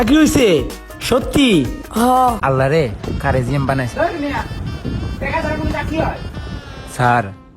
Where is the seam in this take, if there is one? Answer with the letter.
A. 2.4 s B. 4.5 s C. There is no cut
A